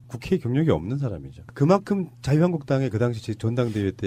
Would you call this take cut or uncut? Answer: uncut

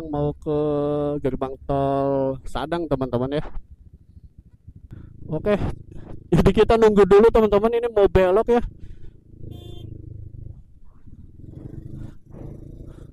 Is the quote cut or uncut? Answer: cut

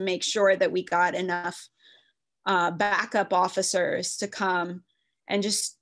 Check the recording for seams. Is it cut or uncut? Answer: uncut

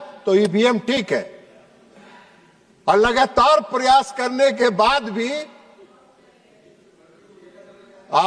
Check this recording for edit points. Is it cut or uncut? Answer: uncut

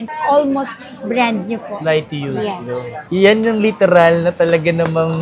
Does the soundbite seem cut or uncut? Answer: cut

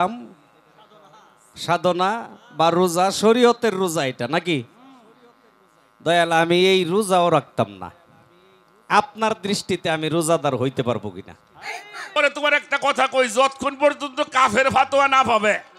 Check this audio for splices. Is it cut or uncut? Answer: cut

